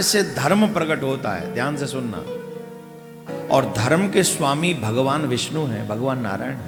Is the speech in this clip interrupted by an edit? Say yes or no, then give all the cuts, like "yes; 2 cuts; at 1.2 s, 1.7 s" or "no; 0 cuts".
no; 0 cuts